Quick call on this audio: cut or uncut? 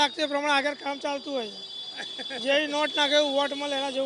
uncut